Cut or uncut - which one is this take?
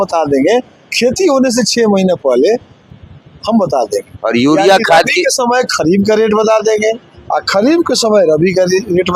uncut